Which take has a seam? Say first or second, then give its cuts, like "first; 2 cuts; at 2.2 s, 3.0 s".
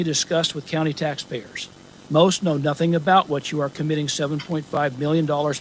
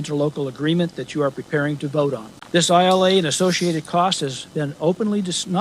second; 1 cut; at 2.3 s